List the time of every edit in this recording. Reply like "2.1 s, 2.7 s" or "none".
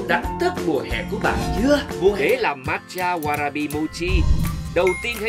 2.2 s